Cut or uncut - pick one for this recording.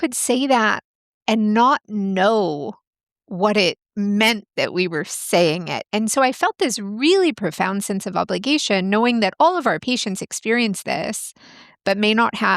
cut